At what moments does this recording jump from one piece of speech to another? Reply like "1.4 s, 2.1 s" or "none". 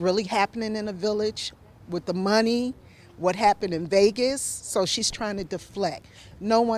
none